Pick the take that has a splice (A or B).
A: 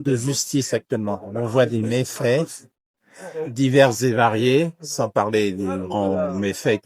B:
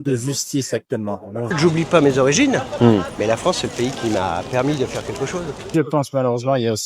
B